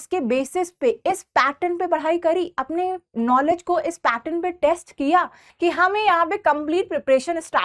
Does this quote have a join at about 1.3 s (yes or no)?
no